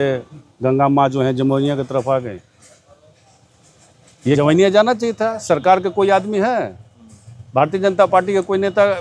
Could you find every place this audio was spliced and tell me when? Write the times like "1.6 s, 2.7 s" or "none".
4.4 s